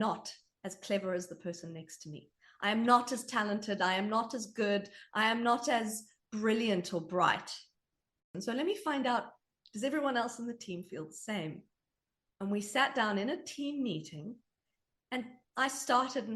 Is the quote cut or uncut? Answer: cut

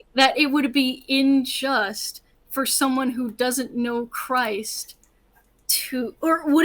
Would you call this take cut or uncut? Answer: uncut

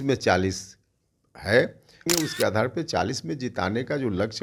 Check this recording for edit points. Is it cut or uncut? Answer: cut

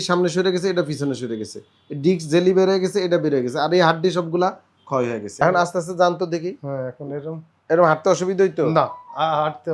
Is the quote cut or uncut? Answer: cut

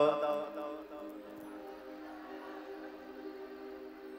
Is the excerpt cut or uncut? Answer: uncut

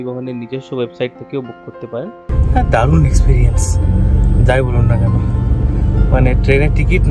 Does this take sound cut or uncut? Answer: cut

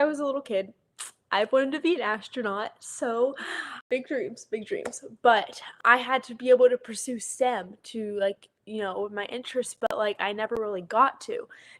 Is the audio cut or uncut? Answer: uncut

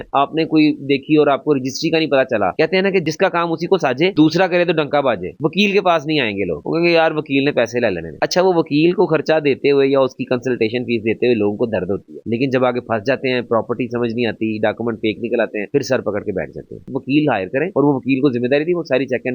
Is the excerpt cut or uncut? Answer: cut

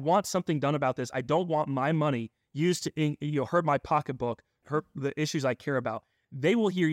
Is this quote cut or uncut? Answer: uncut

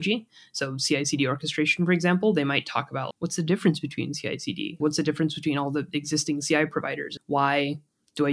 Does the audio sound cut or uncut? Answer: cut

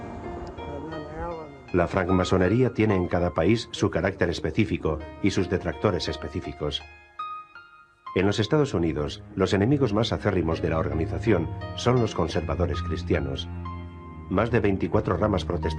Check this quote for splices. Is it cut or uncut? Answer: cut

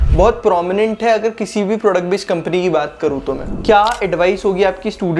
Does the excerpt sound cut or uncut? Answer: cut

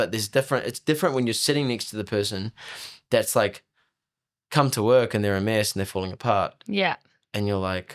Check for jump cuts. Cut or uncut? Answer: uncut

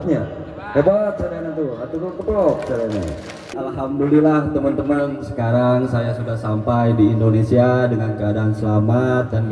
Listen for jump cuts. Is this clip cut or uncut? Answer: cut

